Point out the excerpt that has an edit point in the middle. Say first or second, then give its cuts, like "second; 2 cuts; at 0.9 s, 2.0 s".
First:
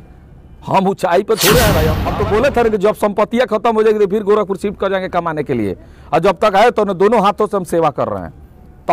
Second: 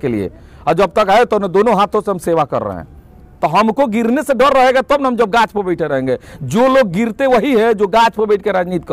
first; 1 cut; at 2.0 s